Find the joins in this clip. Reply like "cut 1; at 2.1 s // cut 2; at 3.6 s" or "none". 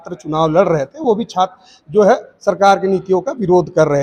none